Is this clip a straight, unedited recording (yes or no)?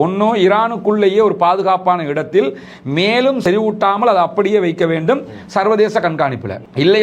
no